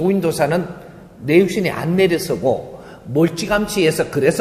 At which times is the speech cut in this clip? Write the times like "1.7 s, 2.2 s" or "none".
none